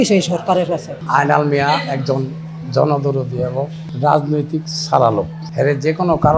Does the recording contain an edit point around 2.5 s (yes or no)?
no